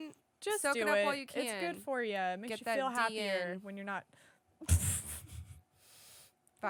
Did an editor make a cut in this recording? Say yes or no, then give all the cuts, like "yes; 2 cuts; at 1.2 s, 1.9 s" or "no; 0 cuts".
no; 0 cuts